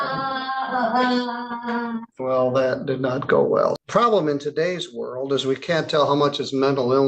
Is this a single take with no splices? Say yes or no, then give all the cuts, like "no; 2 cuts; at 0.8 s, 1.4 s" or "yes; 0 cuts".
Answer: no; 2 cuts; at 2.1 s, 3.8 s